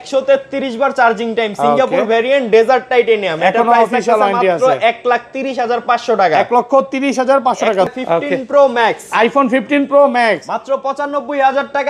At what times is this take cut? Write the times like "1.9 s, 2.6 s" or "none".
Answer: 7.9 s